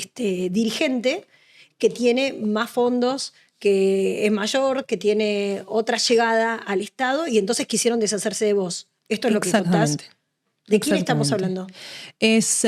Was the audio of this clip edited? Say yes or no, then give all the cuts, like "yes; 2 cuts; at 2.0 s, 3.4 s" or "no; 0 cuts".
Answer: no; 0 cuts